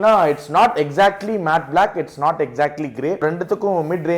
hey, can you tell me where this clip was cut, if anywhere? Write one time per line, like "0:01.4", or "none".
0:03.2